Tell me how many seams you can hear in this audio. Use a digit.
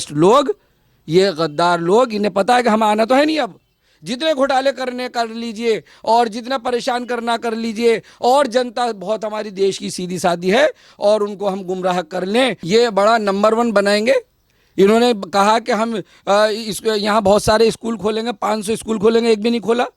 1